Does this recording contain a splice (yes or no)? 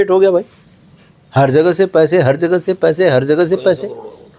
no